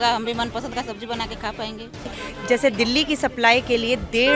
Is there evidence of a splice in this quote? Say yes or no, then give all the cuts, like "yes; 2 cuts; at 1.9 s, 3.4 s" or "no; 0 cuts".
yes; 1 cut; at 2.2 s